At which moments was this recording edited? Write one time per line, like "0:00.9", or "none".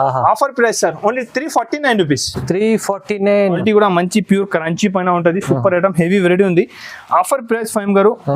0:03.6